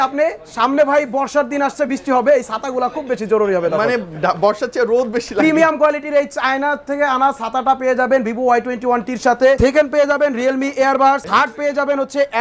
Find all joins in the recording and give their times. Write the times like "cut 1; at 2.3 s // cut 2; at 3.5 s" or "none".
cut 1; at 9.6 s // cut 2; at 11.2 s